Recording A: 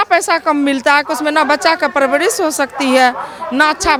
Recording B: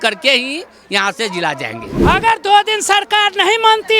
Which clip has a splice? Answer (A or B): B